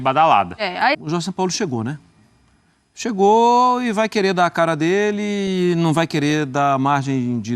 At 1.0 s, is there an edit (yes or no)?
yes